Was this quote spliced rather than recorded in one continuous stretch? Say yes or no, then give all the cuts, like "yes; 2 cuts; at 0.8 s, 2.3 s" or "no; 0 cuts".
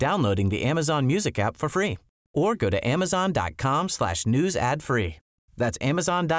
no; 0 cuts